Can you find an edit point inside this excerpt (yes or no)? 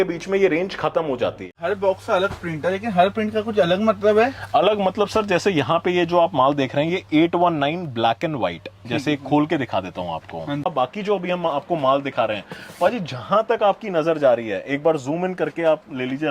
yes